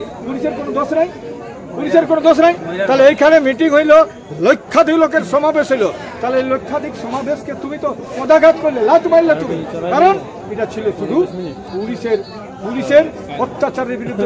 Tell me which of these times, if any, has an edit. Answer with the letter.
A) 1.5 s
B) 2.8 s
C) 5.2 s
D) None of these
D